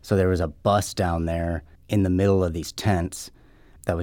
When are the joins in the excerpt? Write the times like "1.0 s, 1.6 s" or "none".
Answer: 1.7 s